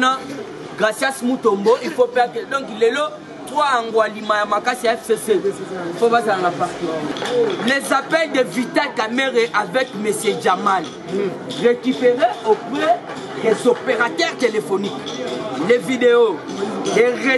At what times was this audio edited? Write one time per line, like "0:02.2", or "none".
0:07.1